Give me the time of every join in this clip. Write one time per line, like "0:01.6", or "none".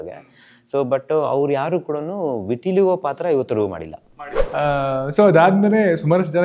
0:04.7